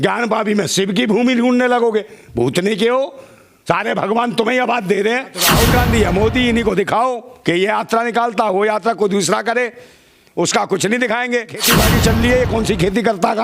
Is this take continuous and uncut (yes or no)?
no